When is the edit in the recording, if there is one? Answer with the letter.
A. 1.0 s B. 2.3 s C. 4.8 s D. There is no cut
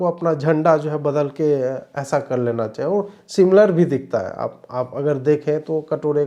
D